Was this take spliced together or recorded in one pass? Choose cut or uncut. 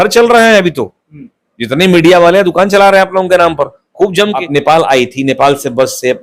cut